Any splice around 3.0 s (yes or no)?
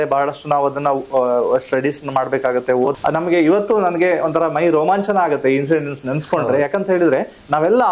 yes